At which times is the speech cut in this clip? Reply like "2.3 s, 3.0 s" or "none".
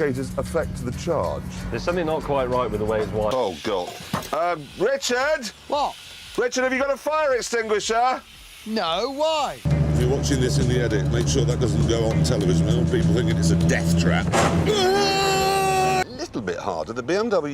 3.3 s, 9.6 s, 16.1 s